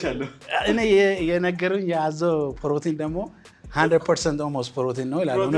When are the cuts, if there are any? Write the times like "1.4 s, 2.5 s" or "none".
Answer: none